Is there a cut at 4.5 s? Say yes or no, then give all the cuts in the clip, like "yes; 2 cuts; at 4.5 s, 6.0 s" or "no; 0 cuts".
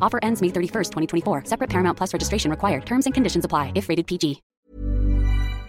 yes; 1 cut; at 4.5 s